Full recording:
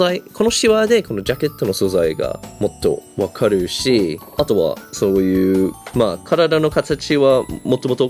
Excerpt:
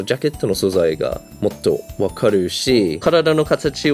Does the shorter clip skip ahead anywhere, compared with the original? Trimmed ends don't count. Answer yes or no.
yes